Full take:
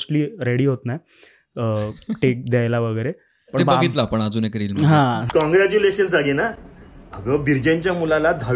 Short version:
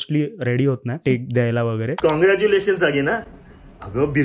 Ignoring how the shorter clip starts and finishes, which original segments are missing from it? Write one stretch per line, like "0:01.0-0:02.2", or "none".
0:01.0-0:02.2
0:03.1-0:05.3